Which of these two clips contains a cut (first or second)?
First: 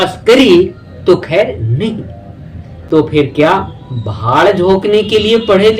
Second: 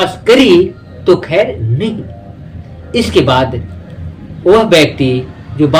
first